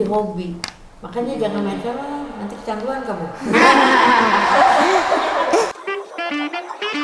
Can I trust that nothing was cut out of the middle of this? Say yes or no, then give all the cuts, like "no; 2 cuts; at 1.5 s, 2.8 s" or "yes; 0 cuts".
no; 1 cut; at 5.8 s